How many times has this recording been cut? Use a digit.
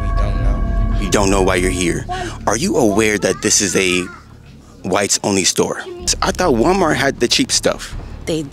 1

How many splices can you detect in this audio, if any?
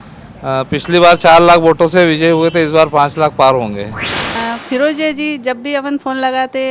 1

